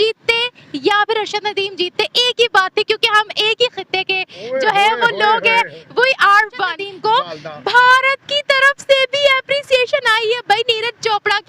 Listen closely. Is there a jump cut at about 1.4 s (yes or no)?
no